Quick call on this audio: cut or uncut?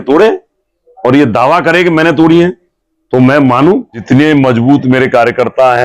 cut